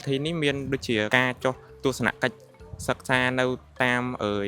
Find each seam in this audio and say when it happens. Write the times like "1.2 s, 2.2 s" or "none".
1.1 s